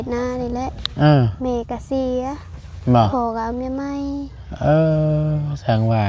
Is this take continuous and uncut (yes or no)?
yes